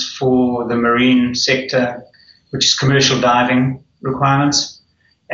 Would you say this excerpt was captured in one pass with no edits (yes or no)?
no